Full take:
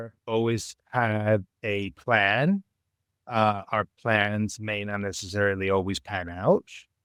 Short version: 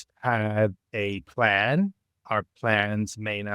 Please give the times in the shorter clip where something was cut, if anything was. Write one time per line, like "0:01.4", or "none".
0:02.2